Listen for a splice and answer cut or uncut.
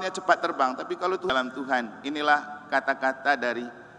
cut